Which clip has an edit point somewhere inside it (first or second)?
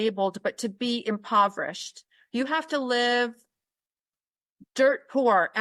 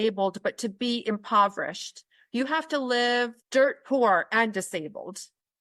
second